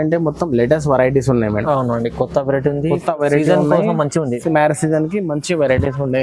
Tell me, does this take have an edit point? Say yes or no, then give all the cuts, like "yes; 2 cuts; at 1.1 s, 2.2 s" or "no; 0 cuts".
no; 0 cuts